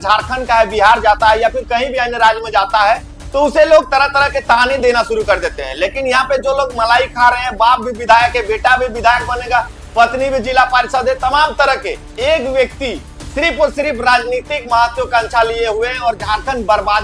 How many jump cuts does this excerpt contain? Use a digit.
0